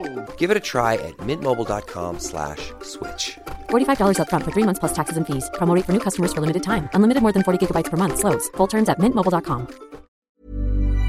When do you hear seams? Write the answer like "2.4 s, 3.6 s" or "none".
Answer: 10.2 s